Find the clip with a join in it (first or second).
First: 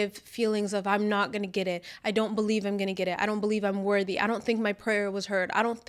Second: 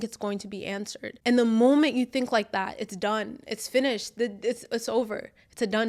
second